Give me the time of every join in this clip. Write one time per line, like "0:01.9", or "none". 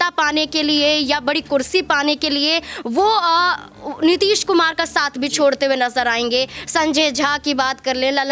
none